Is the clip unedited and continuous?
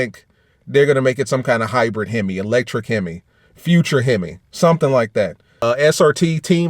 no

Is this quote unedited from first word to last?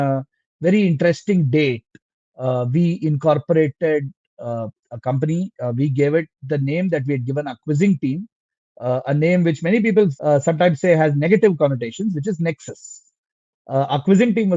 yes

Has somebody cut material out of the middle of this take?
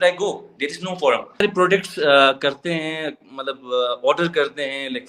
yes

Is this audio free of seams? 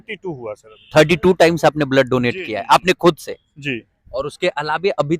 yes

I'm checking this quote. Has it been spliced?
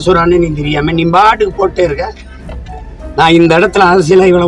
no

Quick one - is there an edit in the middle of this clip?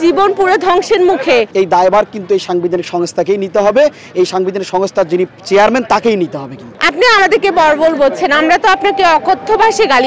yes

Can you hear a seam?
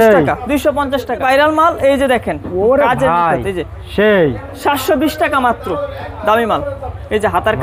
yes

